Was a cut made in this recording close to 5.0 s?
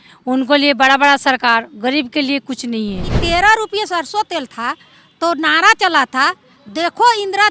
no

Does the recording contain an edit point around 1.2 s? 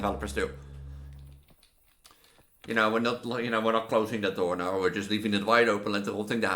yes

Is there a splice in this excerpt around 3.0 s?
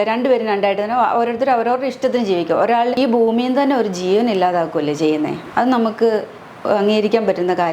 yes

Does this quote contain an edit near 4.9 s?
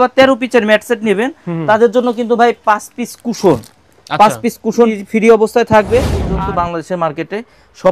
yes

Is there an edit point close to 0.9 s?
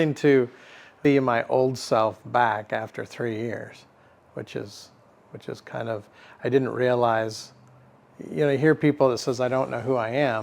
yes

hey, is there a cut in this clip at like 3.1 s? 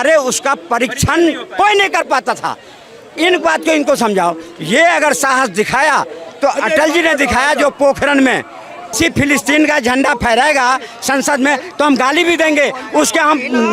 no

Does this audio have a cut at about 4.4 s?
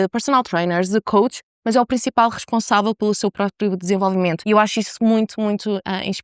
yes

